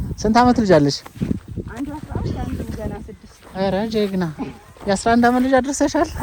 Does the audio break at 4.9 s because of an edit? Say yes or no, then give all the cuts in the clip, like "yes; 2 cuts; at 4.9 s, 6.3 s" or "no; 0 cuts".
no; 0 cuts